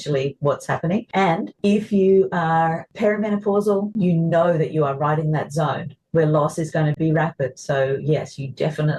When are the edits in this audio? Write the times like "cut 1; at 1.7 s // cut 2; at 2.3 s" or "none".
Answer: cut 1; at 1.3 s // cut 2; at 2.9 s // cut 3; at 3.9 s